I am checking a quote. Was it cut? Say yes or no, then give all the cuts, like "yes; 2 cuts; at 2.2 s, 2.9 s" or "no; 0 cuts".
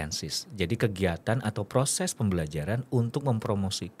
no; 0 cuts